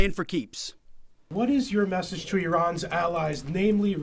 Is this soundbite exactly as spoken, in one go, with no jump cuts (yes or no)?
no